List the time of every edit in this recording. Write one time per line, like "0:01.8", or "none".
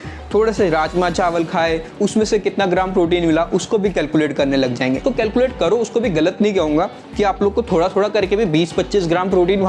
0:05.0